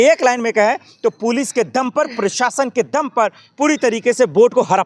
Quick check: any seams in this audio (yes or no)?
no